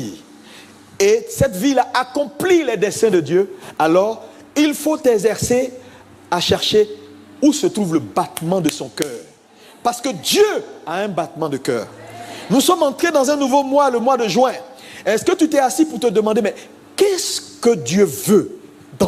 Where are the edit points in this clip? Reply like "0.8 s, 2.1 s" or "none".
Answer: none